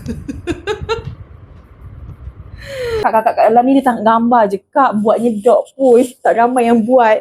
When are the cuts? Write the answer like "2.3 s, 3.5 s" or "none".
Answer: 3.0 s